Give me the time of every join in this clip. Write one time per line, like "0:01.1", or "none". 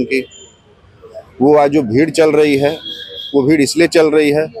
none